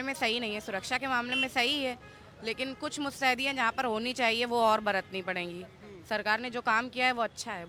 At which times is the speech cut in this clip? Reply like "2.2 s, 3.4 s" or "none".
none